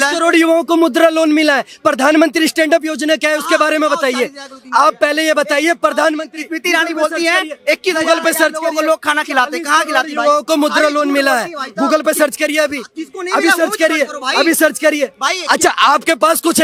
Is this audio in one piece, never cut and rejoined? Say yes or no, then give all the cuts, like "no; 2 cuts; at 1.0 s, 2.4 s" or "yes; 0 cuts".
yes; 0 cuts